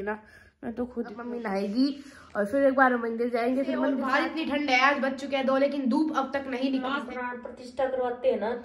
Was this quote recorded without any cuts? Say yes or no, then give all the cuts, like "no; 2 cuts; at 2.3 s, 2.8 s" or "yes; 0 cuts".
no; 3 cuts; at 1.2 s, 4.0 s, 6.9 s